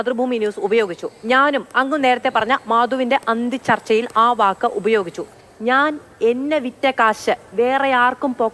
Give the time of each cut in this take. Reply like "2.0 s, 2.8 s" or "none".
5.4 s